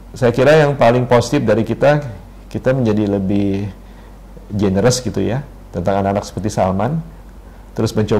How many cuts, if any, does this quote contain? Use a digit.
0